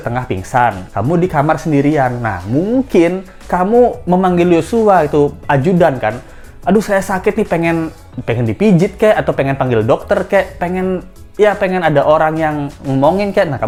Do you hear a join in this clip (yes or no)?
no